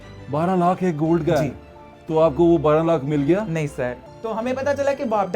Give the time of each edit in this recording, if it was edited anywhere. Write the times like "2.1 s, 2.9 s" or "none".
4.1 s

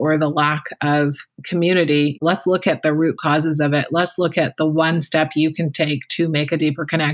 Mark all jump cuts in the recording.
2.2 s

